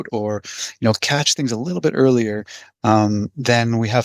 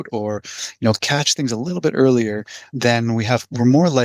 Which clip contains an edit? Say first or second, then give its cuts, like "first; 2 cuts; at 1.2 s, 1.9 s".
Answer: second; 1 cut; at 2.7 s